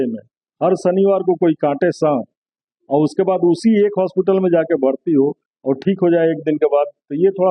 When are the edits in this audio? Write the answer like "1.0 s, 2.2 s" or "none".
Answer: none